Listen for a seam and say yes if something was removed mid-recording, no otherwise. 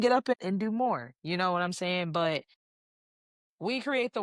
no